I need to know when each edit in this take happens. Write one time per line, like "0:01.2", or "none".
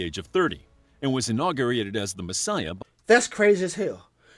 0:02.7